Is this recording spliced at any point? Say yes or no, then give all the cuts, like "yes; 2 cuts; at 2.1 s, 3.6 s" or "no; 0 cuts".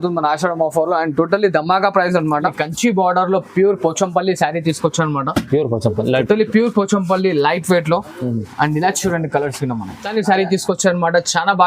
yes; 2 cuts; at 2.6 s, 10.1 s